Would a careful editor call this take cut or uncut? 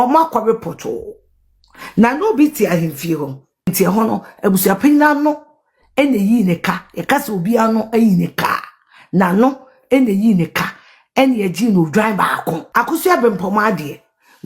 cut